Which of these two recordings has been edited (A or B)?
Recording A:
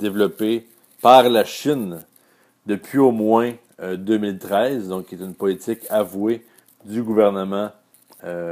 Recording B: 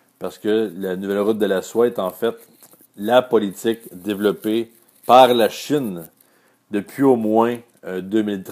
B